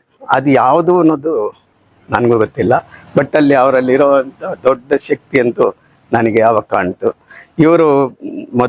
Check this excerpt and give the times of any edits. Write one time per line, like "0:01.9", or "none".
none

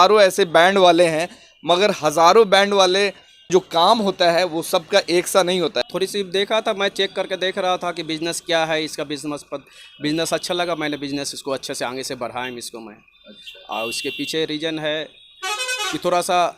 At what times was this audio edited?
0:03.5
0:05.8

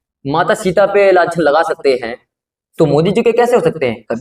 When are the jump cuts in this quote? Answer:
none

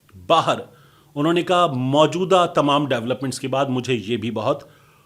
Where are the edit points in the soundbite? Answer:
none

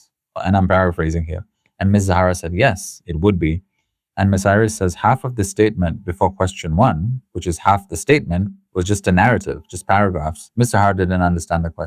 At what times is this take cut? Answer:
none

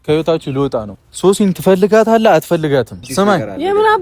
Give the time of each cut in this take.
0:01.0
0:03.0

